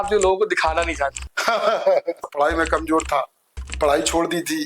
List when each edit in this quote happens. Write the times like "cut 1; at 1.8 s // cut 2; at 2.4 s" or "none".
cut 1; at 2.3 s